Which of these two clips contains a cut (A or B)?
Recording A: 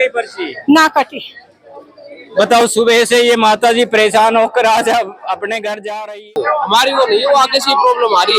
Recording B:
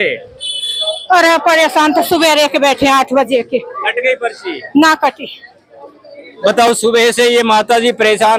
A